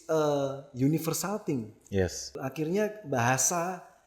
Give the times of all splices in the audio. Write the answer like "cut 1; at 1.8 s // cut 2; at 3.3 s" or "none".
cut 1; at 2.4 s